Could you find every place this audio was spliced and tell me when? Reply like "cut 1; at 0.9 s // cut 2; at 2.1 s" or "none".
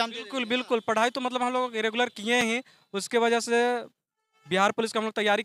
none